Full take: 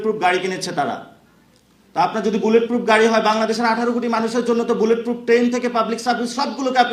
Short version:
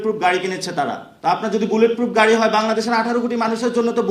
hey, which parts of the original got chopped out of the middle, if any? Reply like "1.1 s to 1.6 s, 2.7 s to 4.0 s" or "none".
1.1 s to 1.8 s